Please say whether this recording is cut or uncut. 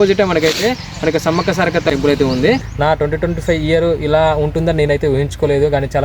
cut